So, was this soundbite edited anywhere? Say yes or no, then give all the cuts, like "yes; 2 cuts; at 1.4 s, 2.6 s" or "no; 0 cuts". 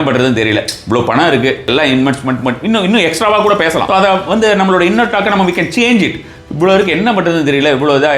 yes; 2 cuts; at 1.7 s, 3.8 s